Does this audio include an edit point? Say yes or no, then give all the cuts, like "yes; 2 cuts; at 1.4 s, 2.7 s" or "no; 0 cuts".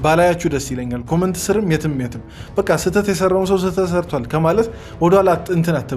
no; 0 cuts